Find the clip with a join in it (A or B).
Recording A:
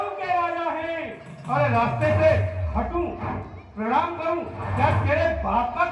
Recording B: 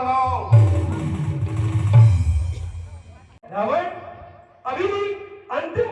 B